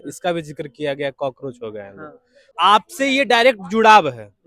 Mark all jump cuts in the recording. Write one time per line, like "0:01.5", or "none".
0:02.4